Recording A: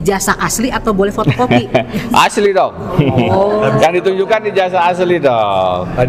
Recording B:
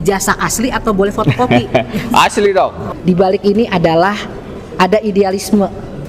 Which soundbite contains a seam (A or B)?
B